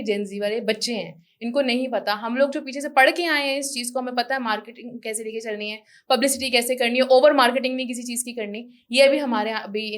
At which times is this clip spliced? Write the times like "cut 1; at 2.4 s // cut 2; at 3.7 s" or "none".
none